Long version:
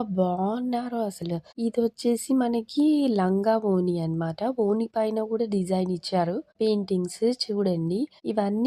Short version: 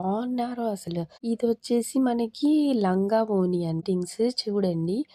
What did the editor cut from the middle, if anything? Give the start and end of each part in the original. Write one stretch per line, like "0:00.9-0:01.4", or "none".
0:04.2-0:06.8

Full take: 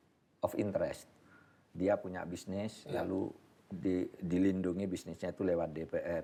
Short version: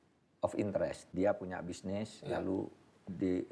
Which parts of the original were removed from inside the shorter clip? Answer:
0:01.0-0:01.7

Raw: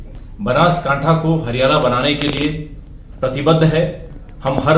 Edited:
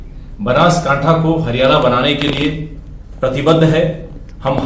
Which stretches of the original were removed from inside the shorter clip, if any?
none

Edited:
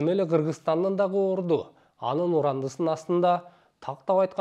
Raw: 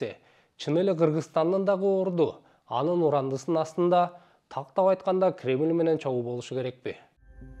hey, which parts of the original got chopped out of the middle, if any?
none

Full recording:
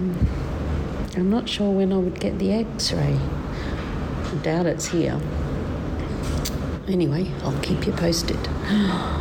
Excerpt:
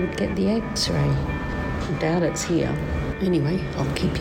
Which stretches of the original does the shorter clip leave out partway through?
0:03.5-0:04.0
0:05.6-0:06.8

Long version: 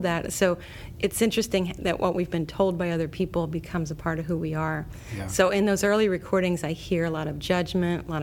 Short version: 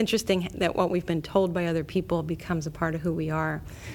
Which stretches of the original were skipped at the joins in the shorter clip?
none

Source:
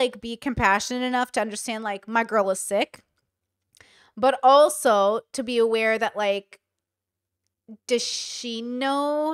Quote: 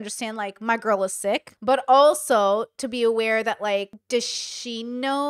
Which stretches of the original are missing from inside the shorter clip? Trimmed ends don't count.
0:03.0-0:04.1
0:06.5-0:07.8

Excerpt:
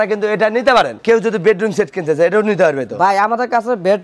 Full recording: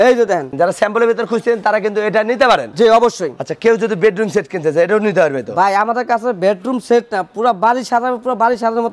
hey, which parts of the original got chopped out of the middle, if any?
0:02.7-0:03.5

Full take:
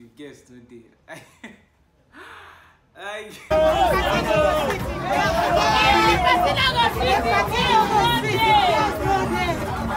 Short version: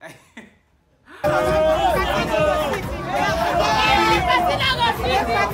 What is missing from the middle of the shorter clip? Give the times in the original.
0:02.3-0:03.2

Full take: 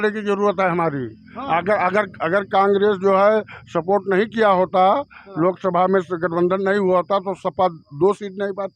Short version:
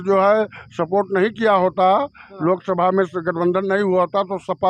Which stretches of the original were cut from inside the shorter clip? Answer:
none

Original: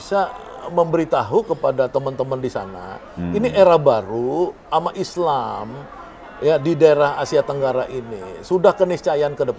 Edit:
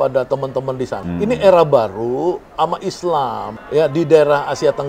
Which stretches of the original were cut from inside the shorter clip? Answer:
0:02.6-0:03.1
0:05.7-0:06.2

